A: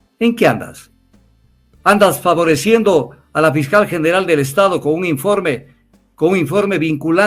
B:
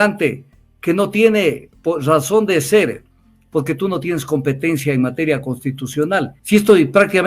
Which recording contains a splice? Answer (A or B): B